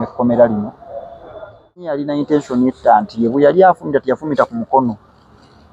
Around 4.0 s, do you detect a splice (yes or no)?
no